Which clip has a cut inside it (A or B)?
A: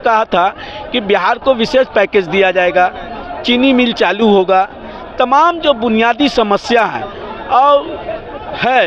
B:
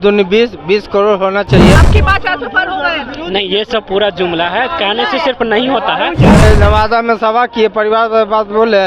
B